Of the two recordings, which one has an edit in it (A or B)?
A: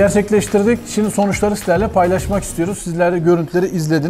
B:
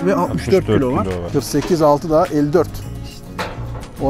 B